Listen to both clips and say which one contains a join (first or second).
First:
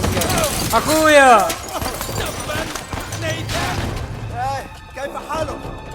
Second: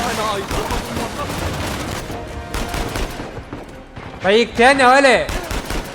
second